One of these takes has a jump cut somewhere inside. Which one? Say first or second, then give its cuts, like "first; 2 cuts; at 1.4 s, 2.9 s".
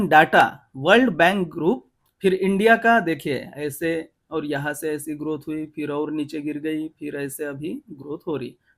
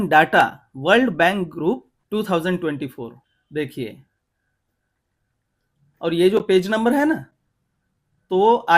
first; 1 cut; at 1.9 s